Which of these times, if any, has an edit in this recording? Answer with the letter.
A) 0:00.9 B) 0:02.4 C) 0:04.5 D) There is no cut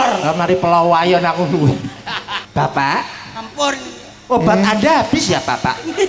B